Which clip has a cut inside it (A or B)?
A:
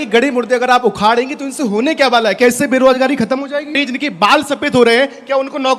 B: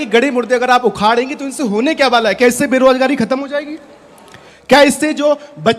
A